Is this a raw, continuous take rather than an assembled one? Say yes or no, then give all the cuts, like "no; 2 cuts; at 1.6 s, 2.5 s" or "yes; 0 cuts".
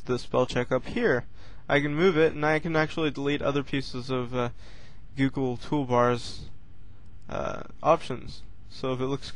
yes; 0 cuts